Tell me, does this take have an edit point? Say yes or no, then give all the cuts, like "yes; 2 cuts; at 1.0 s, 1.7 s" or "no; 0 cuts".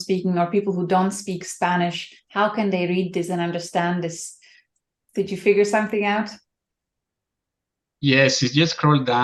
no; 0 cuts